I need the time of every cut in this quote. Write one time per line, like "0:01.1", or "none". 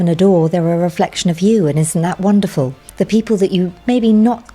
0:02.8
0:03.8